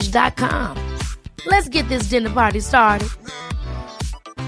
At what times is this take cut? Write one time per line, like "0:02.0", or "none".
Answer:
none